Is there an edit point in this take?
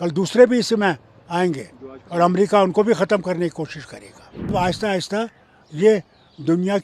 yes; 1 cut; at 4.5 s

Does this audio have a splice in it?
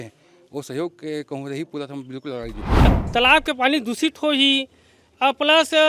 yes; 1 cut; at 2.9 s

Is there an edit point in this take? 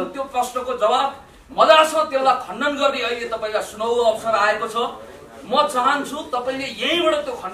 no; 0 cuts

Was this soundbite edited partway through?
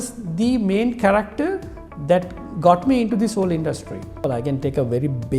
yes; 1 cut; at 4.2 s

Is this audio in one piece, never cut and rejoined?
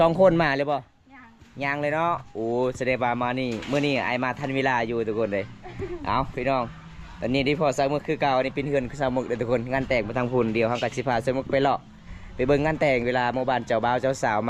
yes; 0 cuts

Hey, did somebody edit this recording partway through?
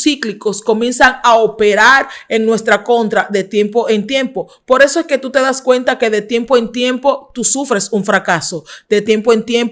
no; 0 cuts

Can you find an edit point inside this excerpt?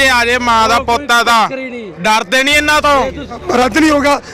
yes; 1 cut; at 3.4 s

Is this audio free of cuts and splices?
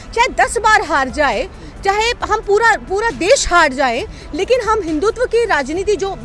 yes; 0 cuts

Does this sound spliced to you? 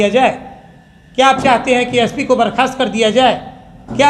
no; 0 cuts

